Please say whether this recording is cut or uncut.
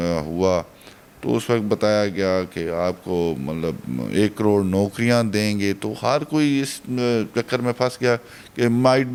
uncut